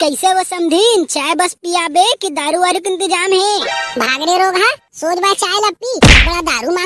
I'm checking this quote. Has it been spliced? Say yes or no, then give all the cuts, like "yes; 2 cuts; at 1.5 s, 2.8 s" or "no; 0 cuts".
no; 0 cuts